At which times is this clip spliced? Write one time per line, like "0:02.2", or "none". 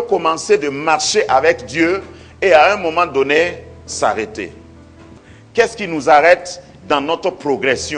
none